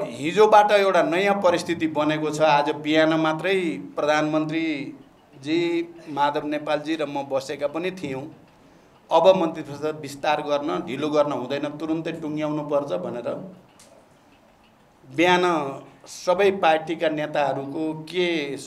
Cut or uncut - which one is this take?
uncut